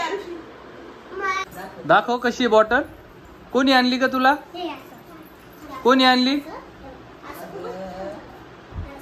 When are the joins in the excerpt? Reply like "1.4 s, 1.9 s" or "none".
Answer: 1.5 s